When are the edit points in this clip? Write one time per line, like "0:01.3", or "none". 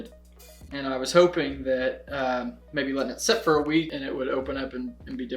0:04.0